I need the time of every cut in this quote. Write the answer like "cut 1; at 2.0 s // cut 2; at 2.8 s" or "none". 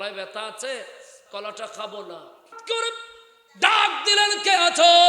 cut 1; at 2.5 s